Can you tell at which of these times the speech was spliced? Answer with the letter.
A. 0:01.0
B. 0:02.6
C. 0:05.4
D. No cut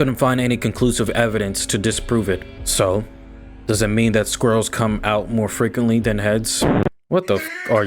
B